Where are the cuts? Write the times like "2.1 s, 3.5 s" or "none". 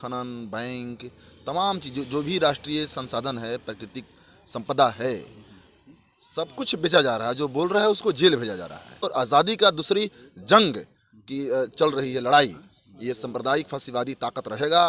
9.0 s